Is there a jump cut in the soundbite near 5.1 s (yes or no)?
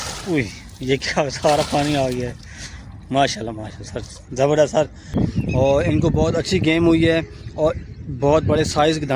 yes